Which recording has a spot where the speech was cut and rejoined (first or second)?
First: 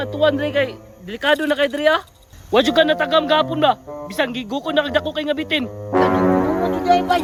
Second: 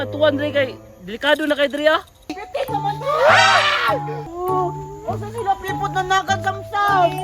second